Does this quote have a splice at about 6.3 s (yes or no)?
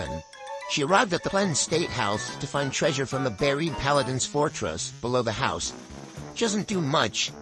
no